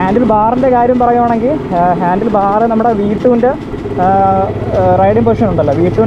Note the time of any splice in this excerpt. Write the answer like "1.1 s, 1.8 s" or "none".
none